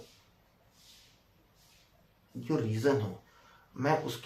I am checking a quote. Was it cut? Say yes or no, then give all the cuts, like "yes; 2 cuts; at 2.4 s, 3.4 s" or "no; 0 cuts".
no; 0 cuts